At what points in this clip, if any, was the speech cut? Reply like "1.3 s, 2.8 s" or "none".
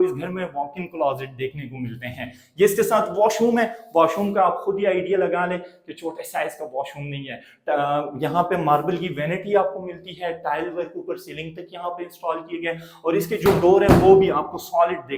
none